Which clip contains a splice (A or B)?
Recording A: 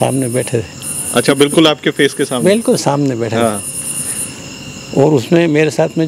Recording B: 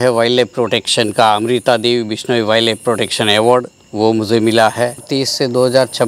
B